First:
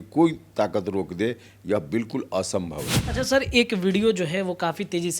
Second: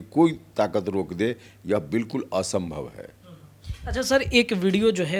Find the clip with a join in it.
first; 1 cut; at 3.0 s

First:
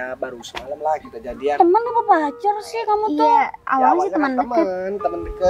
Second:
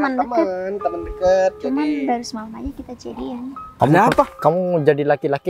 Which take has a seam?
second; 1 cut; at 3.7 s

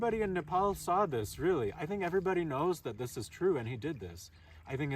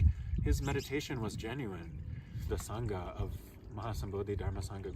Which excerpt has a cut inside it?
second; 1 cut; at 2.5 s

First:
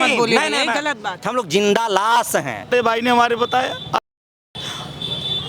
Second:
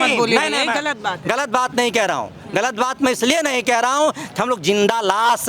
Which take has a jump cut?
first; 2 cuts; at 1.1 s, 2.7 s

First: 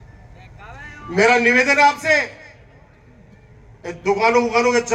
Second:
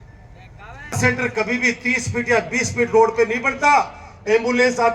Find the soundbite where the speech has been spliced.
second; 1 cut; at 1.0 s

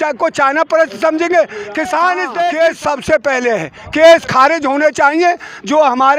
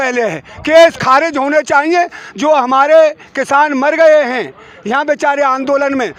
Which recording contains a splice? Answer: first; 1 cut; at 2.3 s

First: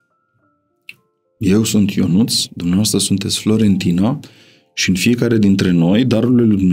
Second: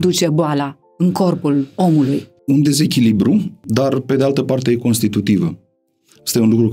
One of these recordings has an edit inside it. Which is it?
second; 2 cuts; at 2.3 s, 3.6 s

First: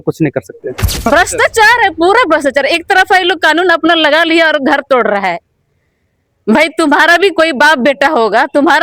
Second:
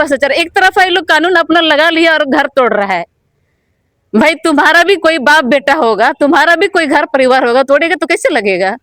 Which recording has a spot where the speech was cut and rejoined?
first; 1 cut; at 1.1 s

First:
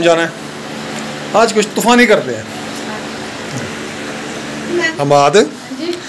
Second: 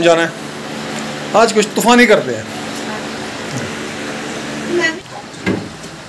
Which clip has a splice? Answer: first; 1 cut; at 4.9 s

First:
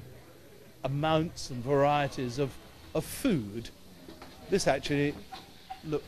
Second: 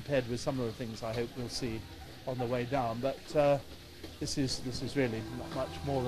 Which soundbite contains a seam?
second; 1 cut; at 1.5 s

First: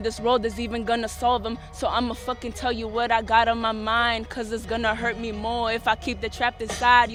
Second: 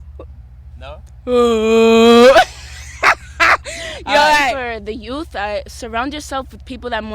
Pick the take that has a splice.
second; 1 cut; at 4.6 s

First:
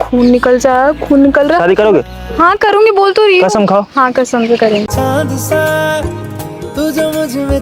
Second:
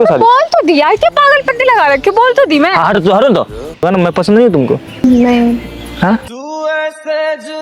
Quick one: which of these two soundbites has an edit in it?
second; 2 cuts; at 3.8 s, 4.9 s

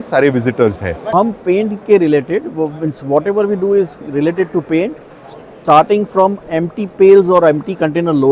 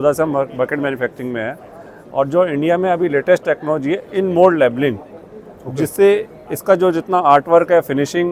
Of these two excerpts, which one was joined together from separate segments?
first; 1 cut; at 1.1 s

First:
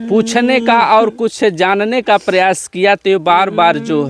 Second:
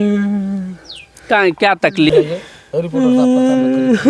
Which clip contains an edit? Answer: second; 1 cut; at 2.1 s

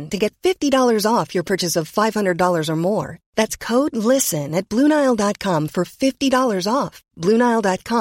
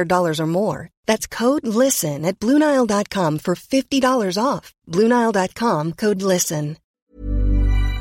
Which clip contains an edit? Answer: second; 1 cut; at 6.9 s

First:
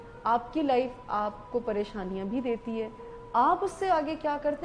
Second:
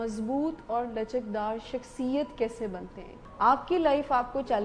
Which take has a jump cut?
second; 1 cut; at 3.2 s

